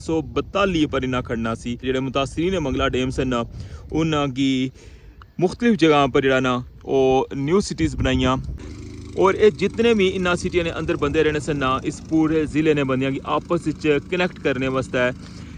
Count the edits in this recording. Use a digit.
2